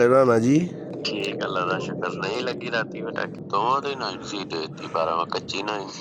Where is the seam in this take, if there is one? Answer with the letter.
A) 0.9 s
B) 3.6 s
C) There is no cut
A